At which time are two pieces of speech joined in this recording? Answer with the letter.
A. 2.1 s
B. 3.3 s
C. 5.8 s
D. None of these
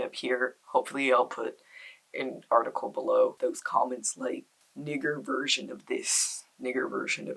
B